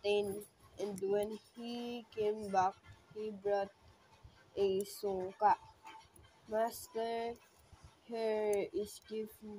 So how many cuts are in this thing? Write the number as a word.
zero